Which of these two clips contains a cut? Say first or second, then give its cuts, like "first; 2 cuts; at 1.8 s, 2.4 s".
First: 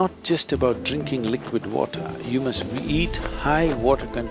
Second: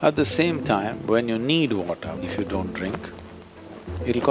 second; 1 cut; at 2.2 s